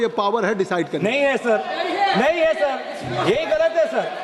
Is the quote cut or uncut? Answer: uncut